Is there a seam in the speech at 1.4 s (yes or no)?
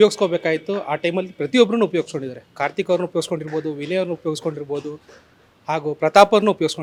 no